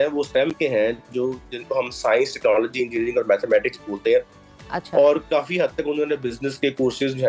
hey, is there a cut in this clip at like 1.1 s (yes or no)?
no